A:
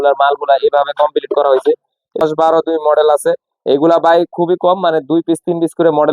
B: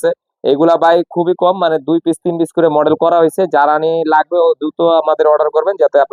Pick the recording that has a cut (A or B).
A